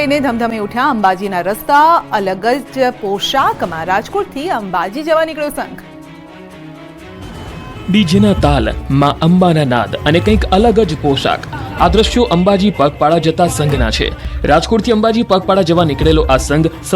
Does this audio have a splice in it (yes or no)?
yes